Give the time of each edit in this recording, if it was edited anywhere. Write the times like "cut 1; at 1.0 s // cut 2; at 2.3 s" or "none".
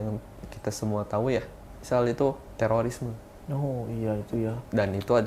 cut 1; at 2.5 s

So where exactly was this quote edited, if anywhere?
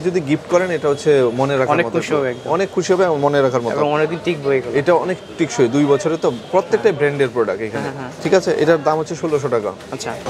none

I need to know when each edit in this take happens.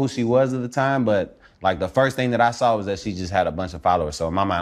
none

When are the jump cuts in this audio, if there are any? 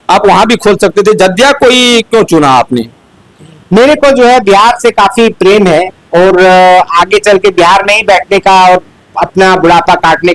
none

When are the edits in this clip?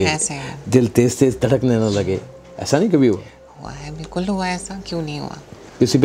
none

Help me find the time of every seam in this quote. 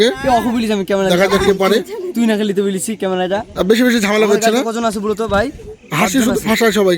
none

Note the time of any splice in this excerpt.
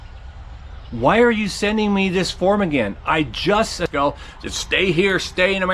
cut 1; at 3.9 s

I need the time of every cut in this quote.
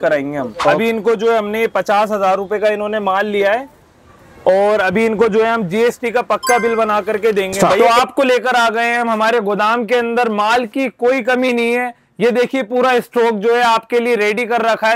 cut 1; at 0.8 s // cut 2; at 7.8 s

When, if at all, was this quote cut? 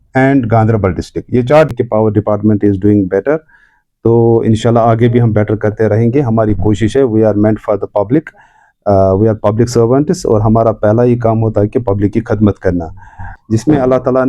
cut 1; at 1.7 s // cut 2; at 13.3 s

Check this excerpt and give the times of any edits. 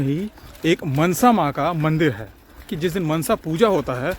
cut 1; at 2.7 s

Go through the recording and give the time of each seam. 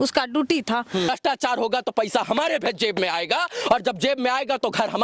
cut 1; at 1.1 s

